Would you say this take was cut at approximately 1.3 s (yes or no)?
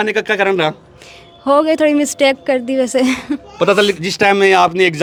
no